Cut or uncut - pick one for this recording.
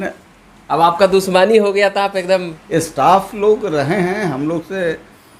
cut